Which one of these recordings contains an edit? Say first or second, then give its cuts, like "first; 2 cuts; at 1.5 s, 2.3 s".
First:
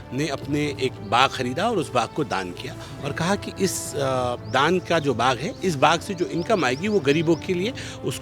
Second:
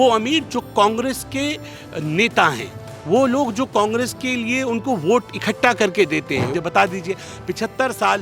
second; 1 cut; at 6.5 s